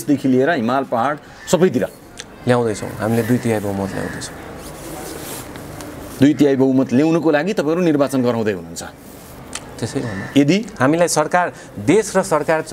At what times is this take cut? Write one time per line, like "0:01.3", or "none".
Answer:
none